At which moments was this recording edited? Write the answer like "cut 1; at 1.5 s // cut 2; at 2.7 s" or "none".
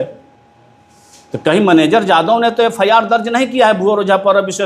none